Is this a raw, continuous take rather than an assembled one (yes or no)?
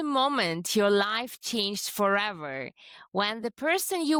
yes